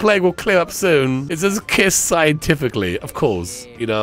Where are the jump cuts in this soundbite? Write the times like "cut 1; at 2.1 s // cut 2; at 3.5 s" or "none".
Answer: cut 1; at 1.3 s